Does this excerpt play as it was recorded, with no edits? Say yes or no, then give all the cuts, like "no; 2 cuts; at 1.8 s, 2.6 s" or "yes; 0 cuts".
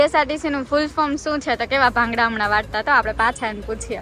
yes; 0 cuts